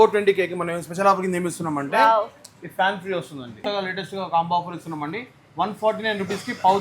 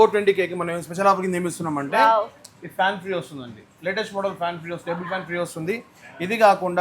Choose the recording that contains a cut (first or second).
first